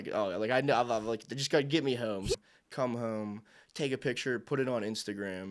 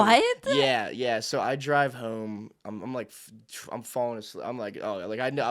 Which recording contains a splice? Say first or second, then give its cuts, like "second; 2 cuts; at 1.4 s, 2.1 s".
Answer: first; 1 cut; at 2.4 s